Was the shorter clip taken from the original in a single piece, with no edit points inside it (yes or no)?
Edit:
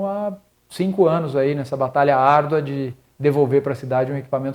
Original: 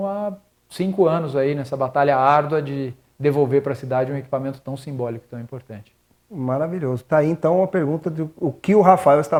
yes